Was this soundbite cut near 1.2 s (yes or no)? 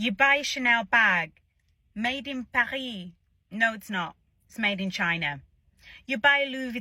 no